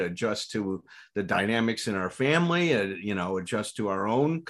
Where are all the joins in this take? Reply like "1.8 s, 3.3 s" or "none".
none